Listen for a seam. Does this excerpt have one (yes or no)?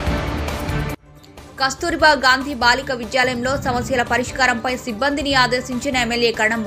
yes